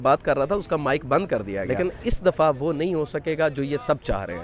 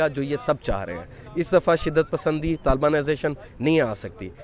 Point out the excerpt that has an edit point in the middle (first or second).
first